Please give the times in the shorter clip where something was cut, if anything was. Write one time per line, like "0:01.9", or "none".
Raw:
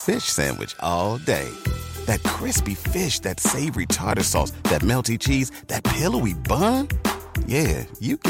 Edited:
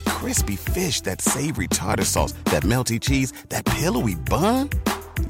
none